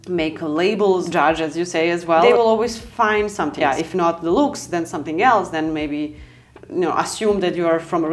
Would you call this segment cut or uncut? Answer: cut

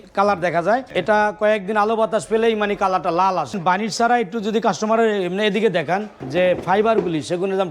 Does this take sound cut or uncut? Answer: cut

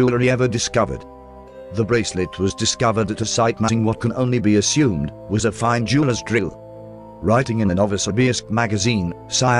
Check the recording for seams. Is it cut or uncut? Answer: uncut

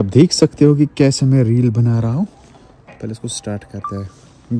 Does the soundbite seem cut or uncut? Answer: uncut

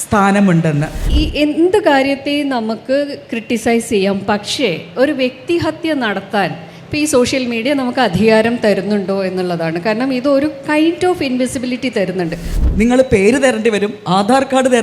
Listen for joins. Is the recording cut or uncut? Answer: cut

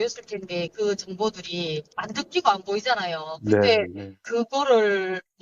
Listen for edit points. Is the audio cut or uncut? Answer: cut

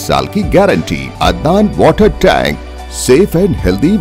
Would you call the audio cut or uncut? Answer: cut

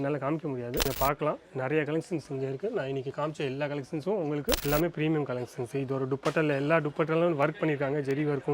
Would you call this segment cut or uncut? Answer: cut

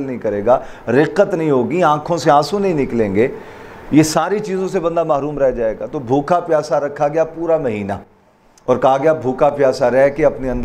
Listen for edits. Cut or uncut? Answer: uncut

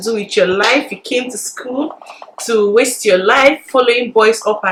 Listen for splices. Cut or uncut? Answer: uncut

